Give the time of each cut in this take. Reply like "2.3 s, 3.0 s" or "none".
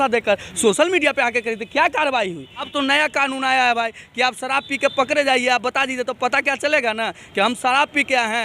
2.7 s